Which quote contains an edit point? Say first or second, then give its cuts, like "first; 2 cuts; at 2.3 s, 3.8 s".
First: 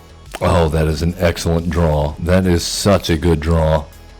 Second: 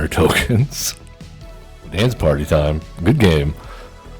second; 1 cut; at 1.9 s